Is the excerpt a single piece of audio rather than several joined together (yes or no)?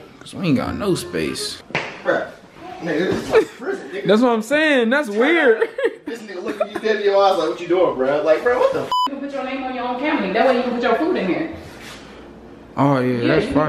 no